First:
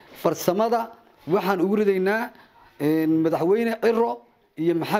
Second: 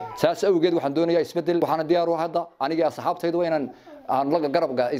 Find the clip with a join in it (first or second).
second